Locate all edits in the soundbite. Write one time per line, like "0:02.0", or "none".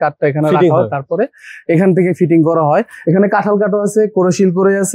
0:02.9